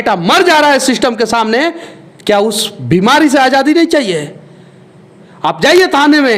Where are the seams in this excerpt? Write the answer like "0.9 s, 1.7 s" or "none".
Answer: none